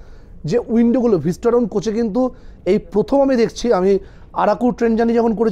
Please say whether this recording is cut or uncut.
uncut